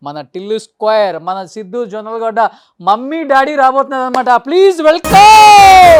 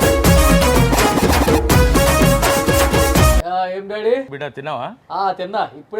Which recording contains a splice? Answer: second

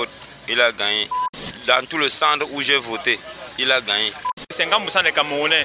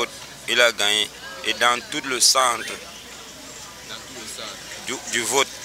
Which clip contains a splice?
first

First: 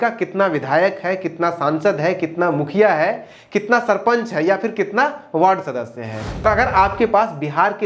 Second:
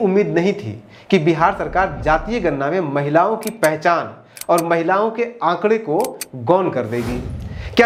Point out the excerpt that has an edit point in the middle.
first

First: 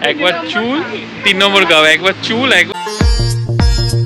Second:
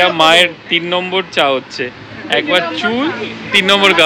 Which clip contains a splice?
first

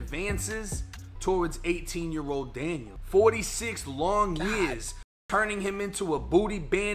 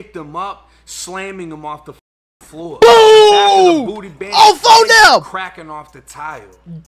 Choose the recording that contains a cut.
first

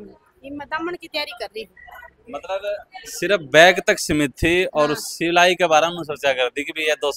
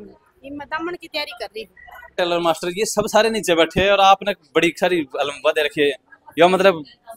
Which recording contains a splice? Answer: second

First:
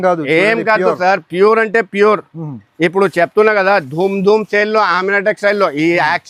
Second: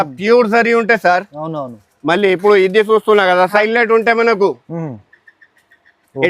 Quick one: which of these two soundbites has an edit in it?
second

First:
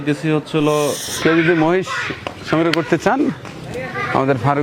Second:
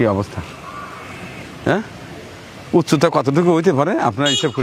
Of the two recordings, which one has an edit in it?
first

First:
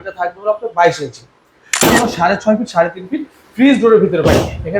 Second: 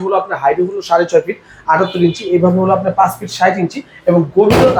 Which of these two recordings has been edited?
first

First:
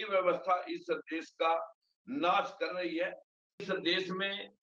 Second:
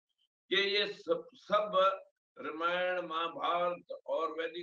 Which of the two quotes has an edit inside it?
first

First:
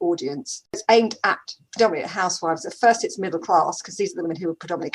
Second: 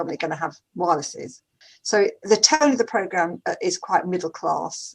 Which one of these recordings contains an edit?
second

